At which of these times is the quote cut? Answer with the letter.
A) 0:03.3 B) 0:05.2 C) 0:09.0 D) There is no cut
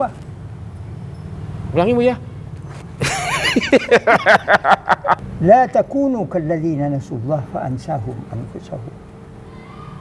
B